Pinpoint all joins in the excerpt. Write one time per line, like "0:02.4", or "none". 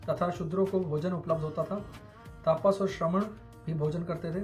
none